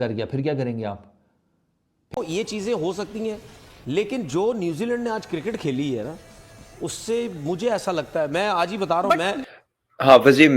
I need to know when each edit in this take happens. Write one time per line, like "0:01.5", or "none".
0:02.2
0:09.3